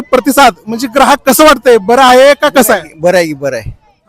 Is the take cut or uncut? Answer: uncut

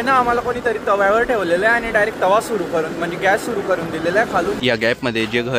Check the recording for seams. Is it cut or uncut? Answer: cut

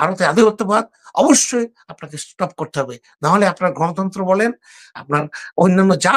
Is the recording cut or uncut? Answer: uncut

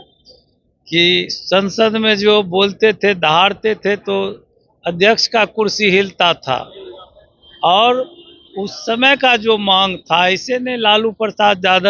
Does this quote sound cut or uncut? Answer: uncut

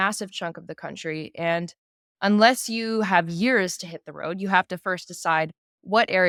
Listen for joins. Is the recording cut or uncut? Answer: uncut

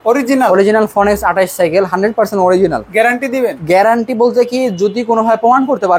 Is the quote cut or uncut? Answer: uncut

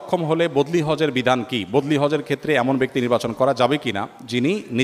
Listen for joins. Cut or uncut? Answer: uncut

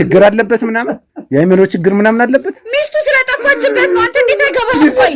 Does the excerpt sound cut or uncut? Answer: uncut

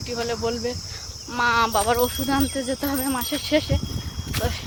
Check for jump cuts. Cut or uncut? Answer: uncut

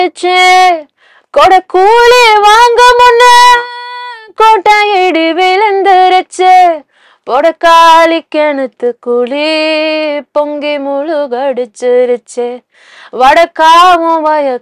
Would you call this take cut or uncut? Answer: uncut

